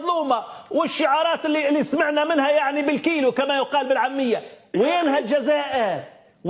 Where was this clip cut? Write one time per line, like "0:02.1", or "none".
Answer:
none